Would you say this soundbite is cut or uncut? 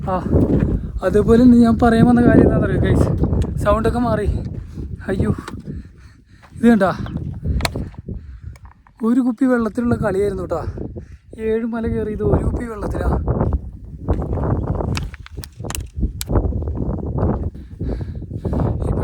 uncut